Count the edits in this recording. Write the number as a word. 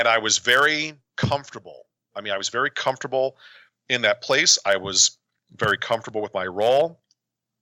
two